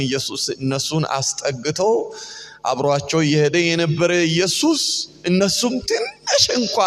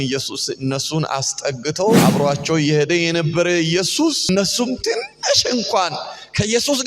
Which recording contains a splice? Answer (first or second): second